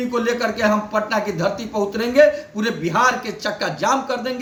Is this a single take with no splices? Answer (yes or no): yes